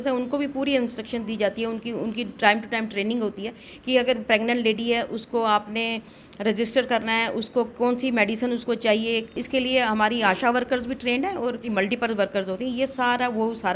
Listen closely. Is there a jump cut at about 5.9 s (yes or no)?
no